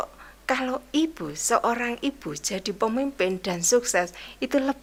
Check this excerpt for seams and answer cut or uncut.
uncut